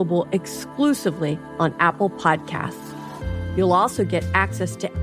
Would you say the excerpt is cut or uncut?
uncut